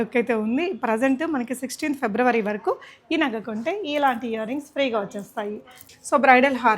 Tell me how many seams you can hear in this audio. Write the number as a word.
one